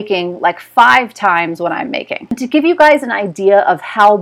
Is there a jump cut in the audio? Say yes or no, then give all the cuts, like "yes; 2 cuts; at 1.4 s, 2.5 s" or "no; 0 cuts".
yes; 1 cut; at 2.3 s